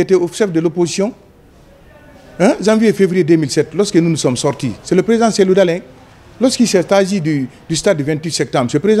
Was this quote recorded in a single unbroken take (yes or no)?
yes